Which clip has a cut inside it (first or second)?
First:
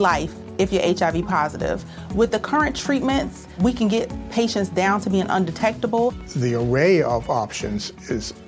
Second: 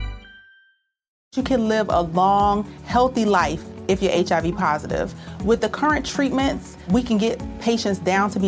second